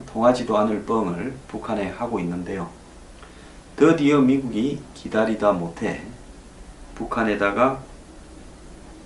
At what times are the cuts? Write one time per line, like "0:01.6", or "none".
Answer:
none